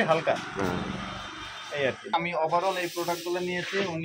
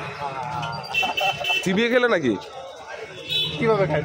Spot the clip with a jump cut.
first; 1 cut; at 2.0 s

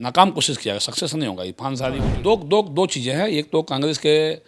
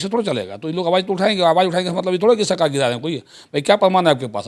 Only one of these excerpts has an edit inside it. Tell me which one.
first; 1 cut; at 2.1 s

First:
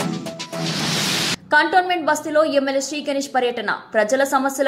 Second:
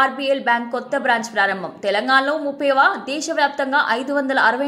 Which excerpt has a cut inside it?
first; 1 cut; at 1.4 s

